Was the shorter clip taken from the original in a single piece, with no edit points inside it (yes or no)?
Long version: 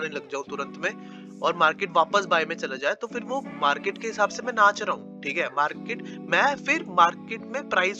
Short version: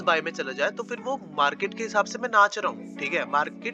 yes